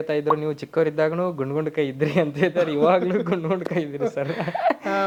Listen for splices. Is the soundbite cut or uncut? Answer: uncut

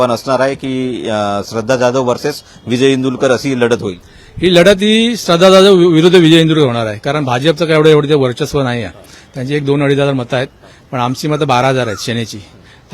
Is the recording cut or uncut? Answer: uncut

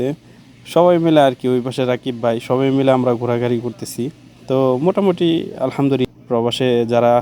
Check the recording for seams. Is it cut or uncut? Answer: cut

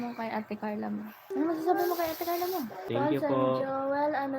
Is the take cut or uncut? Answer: cut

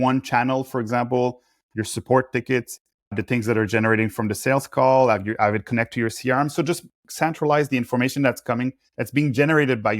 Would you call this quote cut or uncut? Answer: uncut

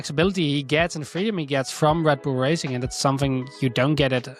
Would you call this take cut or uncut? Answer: uncut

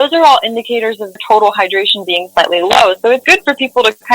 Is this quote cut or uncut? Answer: cut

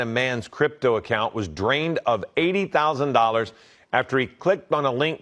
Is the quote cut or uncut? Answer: uncut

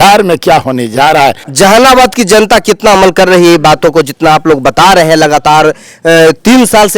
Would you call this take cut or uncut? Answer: cut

